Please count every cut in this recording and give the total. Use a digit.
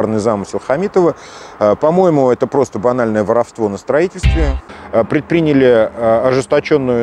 1